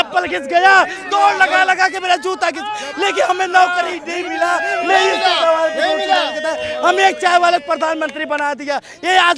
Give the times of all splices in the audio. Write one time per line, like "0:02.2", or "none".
none